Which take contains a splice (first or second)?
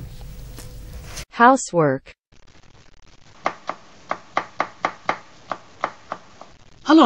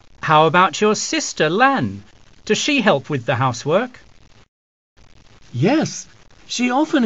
first